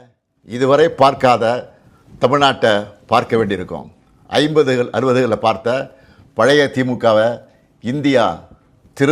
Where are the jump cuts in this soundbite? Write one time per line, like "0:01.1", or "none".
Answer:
none